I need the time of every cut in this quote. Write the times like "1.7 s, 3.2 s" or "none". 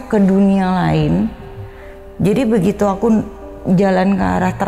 none